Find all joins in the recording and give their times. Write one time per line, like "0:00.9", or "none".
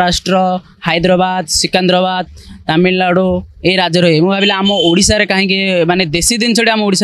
none